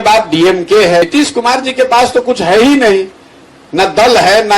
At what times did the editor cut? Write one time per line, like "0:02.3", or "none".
0:01.0